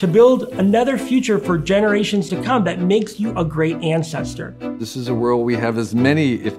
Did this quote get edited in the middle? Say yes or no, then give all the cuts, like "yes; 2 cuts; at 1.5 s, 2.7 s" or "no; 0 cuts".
yes; 1 cut; at 4.8 s